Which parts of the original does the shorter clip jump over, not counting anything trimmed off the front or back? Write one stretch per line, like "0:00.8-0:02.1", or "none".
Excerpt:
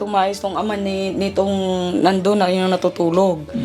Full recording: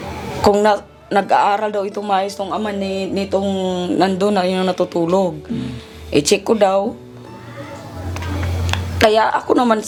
none